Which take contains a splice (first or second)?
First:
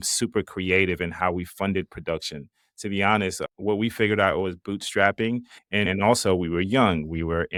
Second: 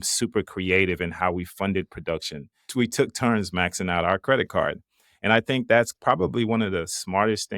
second